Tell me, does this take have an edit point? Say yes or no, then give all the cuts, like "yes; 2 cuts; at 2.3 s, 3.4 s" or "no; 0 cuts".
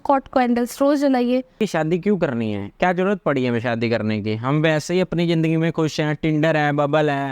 yes; 1 cut; at 1.6 s